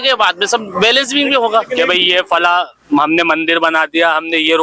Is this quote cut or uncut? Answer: cut